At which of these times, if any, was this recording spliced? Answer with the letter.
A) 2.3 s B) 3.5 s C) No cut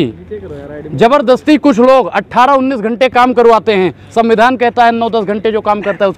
C